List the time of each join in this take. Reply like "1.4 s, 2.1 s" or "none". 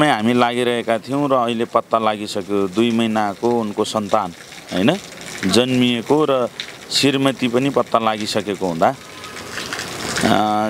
none